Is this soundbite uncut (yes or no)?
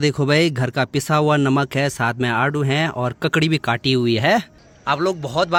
yes